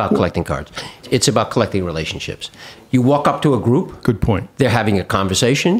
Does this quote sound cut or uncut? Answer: cut